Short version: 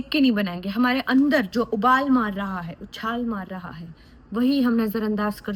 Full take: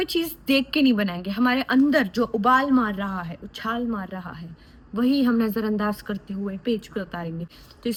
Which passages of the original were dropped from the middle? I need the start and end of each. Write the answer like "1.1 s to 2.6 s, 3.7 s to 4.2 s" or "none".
none